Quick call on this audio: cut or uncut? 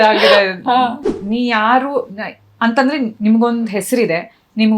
cut